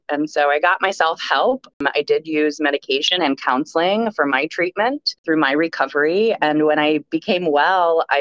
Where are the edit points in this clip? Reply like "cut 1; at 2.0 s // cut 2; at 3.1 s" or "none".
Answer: cut 1; at 1.7 s // cut 2; at 5.1 s